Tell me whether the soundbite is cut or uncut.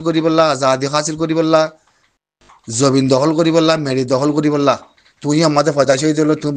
uncut